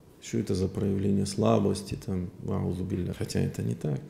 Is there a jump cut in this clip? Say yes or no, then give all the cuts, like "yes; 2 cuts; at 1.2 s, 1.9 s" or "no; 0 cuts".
yes; 1 cut; at 3.2 s